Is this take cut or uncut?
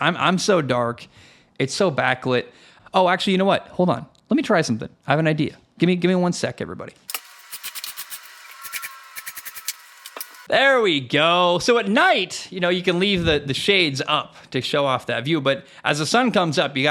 cut